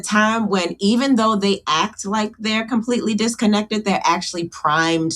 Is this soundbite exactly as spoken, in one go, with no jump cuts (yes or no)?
yes